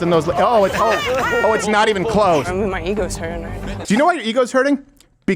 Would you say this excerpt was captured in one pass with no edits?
no; 2 cuts; at 2.5 s, 3.8 s

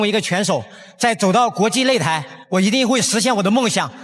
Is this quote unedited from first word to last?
no; 1 cut; at 2.3 s

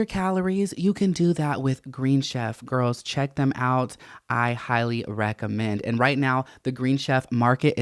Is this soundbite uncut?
yes; 0 cuts

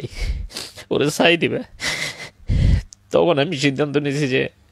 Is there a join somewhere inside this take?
no; 0 cuts

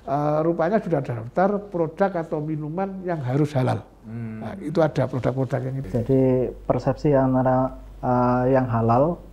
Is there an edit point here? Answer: yes; 1 cut; at 5.7 s

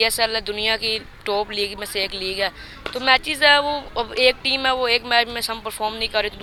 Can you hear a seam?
no; 0 cuts

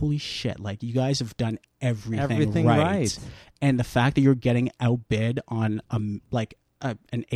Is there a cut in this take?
no; 0 cuts

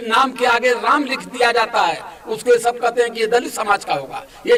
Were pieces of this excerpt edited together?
no; 0 cuts

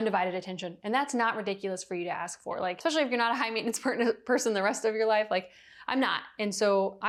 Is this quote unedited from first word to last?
yes; 0 cuts

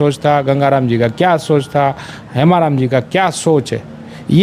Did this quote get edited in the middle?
no; 0 cuts

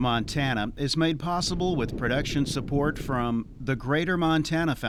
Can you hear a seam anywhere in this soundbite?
no; 0 cuts

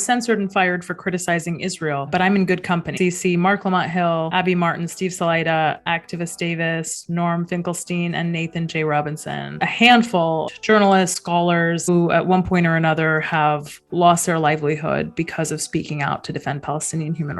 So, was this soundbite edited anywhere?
yes; 4 cuts; at 2.9 s, 9.6 s, 10.5 s, 11.9 s

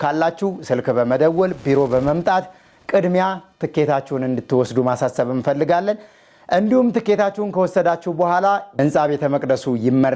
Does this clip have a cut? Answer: yes; 1 cut; at 8.7 s

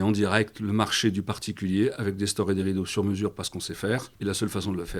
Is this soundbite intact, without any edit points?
no; 1 cut; at 4.1 s

